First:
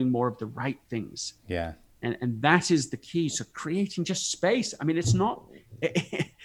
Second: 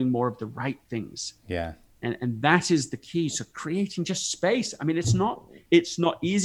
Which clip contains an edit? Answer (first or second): second